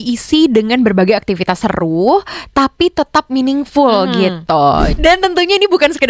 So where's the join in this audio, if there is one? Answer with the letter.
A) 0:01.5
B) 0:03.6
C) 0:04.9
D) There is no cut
C